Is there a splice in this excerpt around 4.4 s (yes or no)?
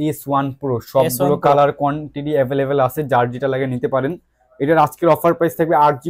no